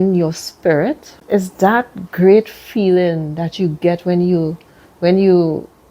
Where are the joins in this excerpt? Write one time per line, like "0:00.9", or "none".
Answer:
0:01.1